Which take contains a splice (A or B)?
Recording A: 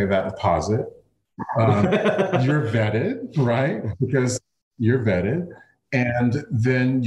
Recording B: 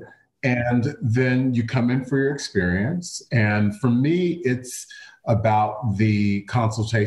A